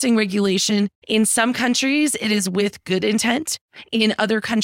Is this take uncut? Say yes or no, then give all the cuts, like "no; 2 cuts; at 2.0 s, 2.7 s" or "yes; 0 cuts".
no; 1 cut; at 1.0 s